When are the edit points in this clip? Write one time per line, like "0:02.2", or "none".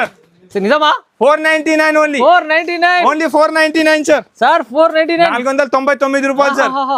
none